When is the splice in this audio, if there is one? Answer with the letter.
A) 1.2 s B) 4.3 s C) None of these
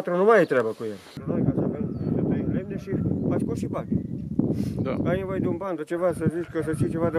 A